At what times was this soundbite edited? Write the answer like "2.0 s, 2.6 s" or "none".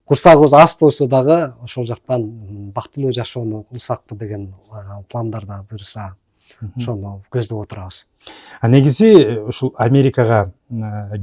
none